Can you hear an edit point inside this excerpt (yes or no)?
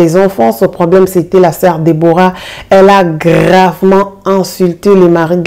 no